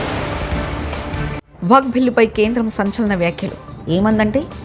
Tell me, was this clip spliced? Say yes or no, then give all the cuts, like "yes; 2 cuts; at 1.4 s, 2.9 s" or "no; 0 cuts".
no; 0 cuts